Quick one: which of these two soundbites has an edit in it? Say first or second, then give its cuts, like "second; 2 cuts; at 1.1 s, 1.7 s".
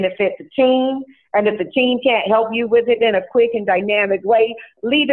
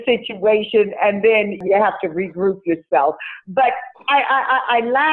second; 1 cut; at 1.6 s